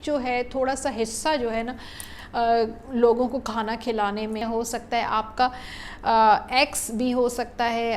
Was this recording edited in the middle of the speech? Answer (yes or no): yes